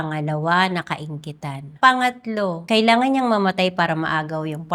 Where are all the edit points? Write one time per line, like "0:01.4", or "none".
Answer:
0:01.6
0:02.6